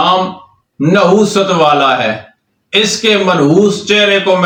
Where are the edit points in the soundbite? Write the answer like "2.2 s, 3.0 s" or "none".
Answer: none